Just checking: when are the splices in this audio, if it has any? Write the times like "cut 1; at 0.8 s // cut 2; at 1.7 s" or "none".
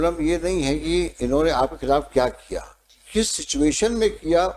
none